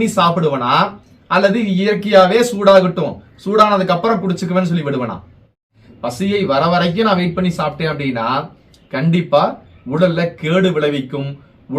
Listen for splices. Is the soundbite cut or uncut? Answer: cut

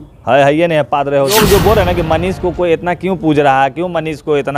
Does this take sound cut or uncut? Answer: cut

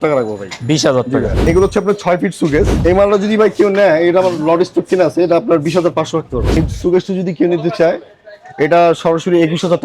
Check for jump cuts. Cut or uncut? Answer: cut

